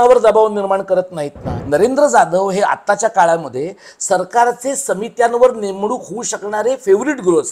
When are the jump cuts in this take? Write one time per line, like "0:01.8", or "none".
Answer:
0:01.6